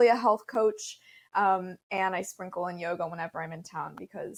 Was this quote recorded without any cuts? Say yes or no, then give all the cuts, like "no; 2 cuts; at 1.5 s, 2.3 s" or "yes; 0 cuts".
yes; 0 cuts